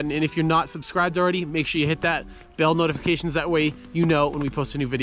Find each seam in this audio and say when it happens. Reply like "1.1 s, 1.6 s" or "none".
none

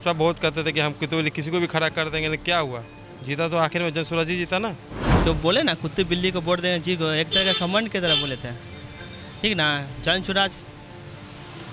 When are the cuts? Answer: 5.1 s

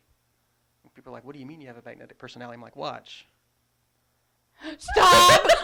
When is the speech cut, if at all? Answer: none

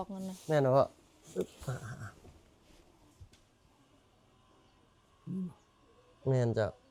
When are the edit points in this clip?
none

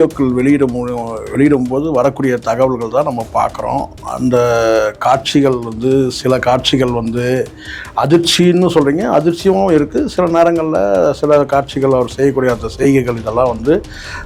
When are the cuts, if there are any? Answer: none

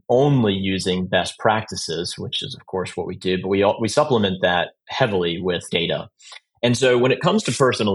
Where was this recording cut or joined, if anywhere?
5.7 s

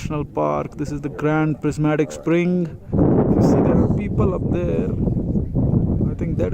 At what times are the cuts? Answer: 2.9 s

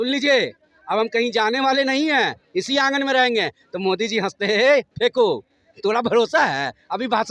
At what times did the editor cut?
none

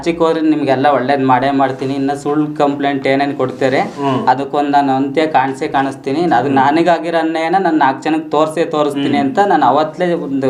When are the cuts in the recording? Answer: none

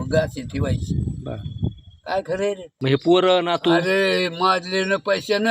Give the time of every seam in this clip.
2.7 s

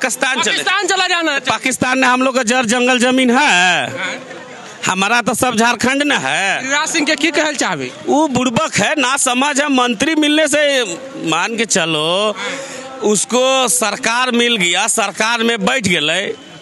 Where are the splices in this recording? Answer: none

